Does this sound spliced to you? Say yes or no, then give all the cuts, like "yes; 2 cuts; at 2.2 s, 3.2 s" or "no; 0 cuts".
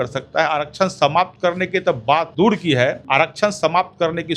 yes; 2 cuts; at 2.3 s, 3.0 s